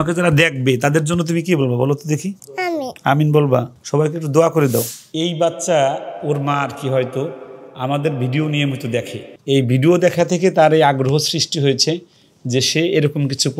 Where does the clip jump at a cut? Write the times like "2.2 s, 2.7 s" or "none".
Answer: 4.9 s